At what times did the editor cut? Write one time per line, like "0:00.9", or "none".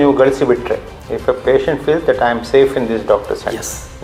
none